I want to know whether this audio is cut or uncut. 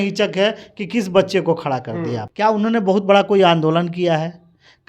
cut